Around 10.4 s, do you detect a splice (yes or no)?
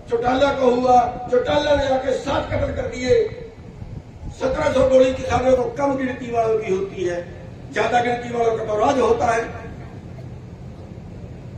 no